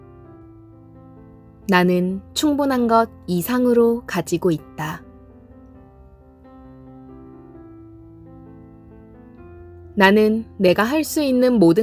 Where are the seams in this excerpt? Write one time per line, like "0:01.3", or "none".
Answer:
0:05.0
0:09.9